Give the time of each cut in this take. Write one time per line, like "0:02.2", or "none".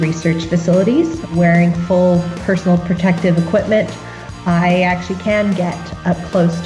0:01.3